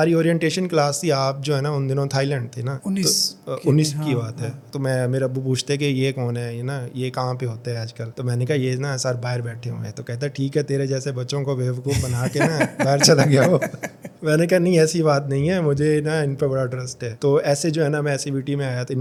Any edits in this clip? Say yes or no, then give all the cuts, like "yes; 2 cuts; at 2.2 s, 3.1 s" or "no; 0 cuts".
no; 0 cuts